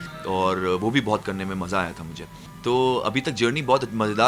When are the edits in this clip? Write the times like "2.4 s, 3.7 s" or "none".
none